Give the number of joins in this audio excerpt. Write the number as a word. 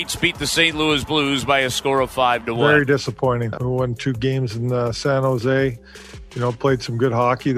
two